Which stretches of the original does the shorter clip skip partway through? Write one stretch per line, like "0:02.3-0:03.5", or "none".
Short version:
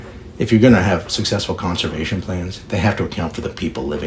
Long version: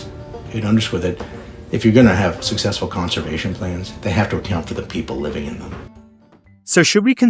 none